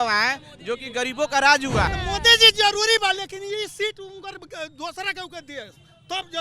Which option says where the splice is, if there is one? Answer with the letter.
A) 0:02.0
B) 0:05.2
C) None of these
A